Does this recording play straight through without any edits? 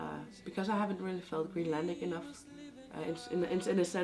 yes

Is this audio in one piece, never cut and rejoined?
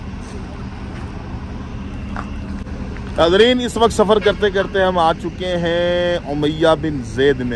yes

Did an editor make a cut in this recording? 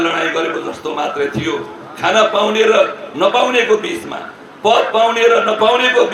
no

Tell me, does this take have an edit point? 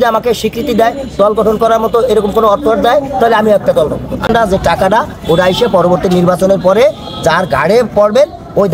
yes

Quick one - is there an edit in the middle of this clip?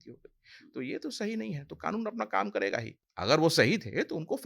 yes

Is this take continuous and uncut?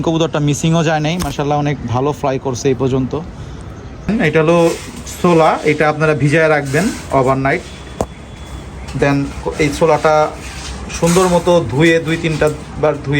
no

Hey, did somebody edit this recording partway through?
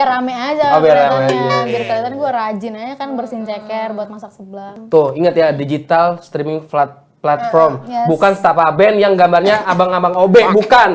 yes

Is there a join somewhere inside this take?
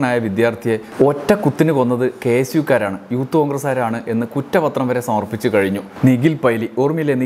yes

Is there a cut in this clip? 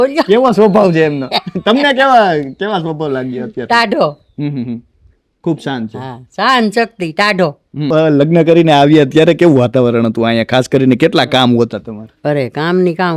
yes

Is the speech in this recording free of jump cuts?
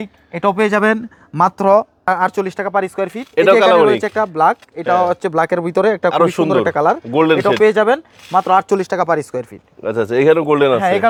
yes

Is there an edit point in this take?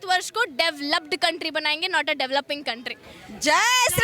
no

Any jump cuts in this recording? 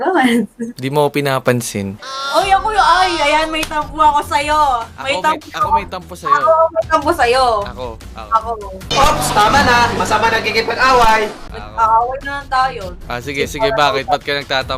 no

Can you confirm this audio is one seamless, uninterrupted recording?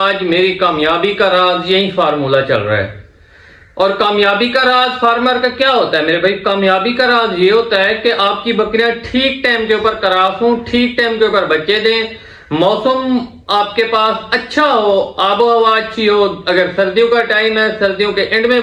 yes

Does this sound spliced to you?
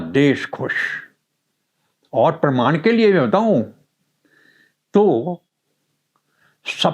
no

